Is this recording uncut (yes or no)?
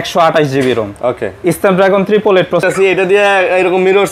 no